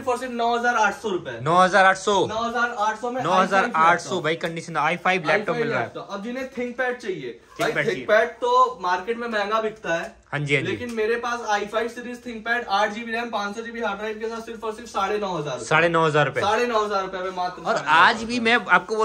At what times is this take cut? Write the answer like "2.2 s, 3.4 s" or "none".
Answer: none